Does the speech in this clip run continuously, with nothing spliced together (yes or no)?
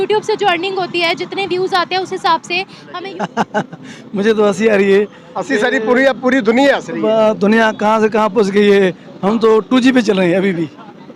no